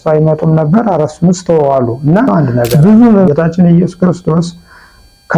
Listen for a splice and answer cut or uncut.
cut